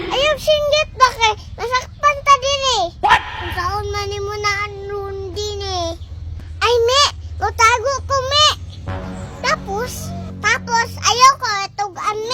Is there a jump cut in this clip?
no; 0 cuts

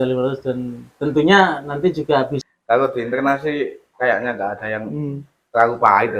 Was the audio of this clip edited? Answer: yes; 1 cut; at 2.4 s

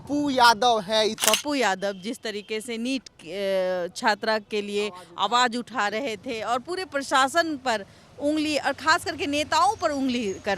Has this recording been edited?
yes; 1 cut; at 1.2 s

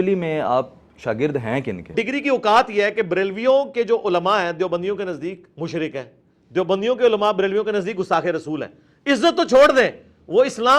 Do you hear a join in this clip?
yes; 2 cuts; at 1.9 s, 5.5 s

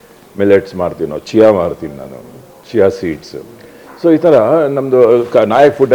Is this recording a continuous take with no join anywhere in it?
yes; 0 cuts

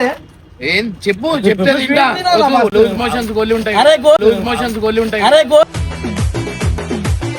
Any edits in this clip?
no; 0 cuts

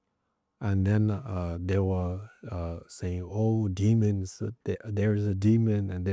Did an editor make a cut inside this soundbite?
no; 0 cuts

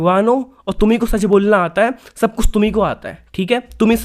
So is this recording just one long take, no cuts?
yes; 0 cuts

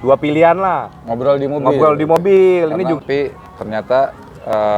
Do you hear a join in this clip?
yes; 1 cut; at 3.0 s

